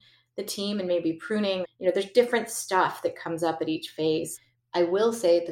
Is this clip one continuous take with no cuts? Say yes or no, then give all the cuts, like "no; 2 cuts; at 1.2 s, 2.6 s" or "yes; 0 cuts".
no; 2 cuts; at 1.6 s, 4.3 s